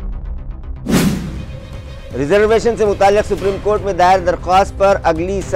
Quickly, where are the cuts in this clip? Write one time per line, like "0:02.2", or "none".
0:01.1